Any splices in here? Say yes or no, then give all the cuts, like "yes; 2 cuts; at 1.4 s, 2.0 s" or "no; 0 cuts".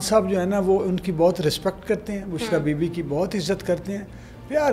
no; 0 cuts